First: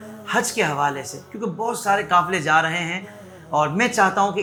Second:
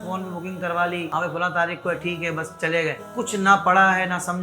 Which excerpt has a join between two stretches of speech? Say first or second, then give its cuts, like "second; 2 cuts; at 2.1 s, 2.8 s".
second; 2 cuts; at 1.1 s, 3.0 s